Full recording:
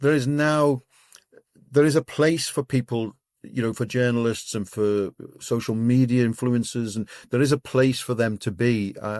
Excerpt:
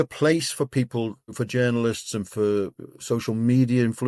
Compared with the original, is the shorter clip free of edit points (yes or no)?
no